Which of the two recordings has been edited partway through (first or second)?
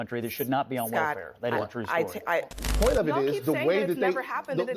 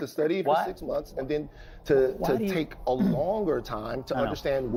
first